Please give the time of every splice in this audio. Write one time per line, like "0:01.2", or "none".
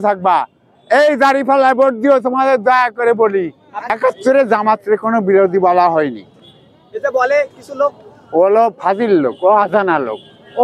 0:03.9